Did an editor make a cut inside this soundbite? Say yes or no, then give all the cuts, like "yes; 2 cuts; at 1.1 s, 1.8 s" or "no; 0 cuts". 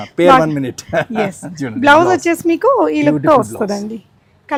no; 0 cuts